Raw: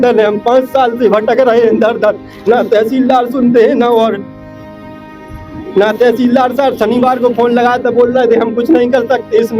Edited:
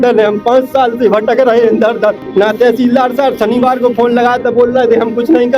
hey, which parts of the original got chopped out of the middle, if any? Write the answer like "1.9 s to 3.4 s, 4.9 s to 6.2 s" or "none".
2.2 s to 5.6 s